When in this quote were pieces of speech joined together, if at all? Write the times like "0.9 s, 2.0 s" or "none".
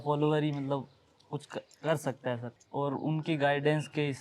2.5 s